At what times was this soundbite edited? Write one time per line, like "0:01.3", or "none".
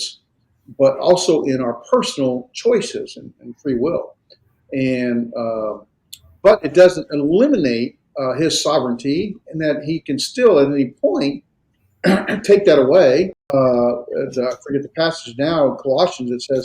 0:13.5